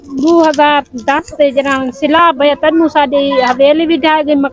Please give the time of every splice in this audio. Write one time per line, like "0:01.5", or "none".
none